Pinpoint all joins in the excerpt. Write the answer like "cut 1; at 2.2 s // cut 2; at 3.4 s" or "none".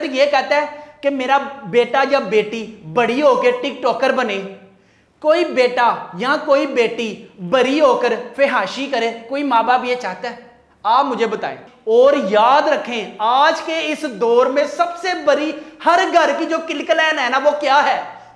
cut 1; at 11.6 s